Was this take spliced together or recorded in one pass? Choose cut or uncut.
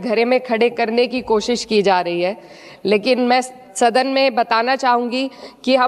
uncut